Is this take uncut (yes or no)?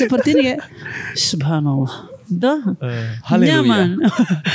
yes